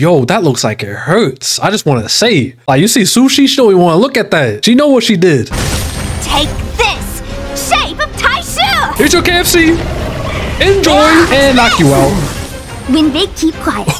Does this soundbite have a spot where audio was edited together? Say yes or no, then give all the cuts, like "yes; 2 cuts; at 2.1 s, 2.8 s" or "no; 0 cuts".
no; 0 cuts